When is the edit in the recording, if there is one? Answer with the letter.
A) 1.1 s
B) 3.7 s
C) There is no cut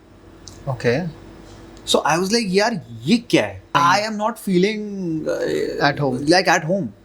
B